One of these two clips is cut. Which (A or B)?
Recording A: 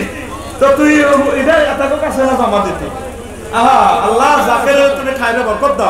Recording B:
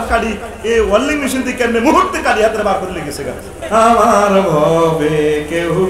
B